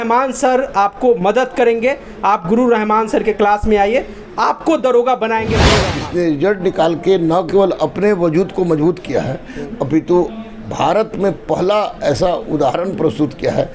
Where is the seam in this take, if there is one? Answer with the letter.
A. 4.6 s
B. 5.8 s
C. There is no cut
B